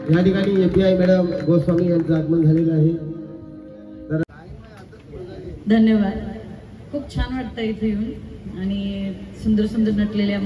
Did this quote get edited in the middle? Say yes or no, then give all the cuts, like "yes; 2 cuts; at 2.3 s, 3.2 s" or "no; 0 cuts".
yes; 1 cut; at 4.2 s